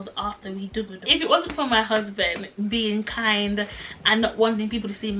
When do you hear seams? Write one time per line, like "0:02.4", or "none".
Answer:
0:01.0